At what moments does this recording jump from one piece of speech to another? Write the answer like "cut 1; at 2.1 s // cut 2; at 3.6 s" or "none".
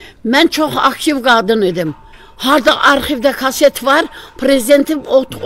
none